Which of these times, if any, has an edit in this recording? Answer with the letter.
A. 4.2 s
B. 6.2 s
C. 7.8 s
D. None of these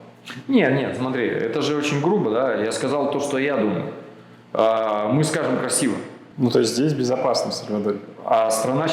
B